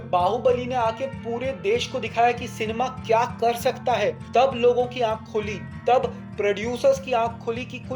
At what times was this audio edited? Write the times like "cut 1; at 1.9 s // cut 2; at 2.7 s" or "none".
cut 1; at 4.2 s